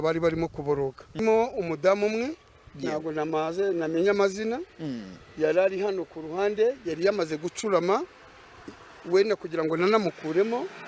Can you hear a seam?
yes; 1 cut; at 1.2 s

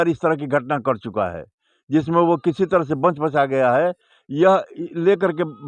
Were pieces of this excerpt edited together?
no; 0 cuts

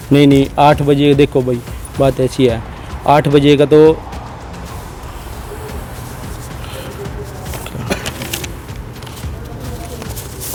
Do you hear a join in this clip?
no; 0 cuts

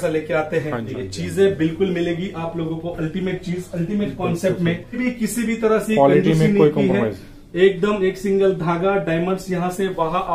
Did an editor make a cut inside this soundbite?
yes; 2 cuts; at 0.9 s, 5.0 s

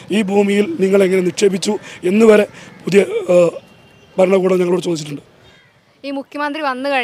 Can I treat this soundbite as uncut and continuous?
yes; 0 cuts

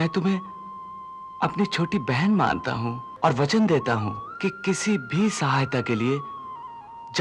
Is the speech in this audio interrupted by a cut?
yes; 2 cuts; at 3.0 s, 4.2 s

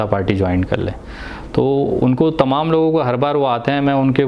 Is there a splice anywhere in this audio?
no; 0 cuts

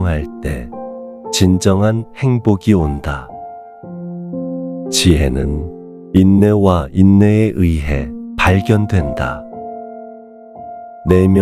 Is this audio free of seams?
yes; 0 cuts

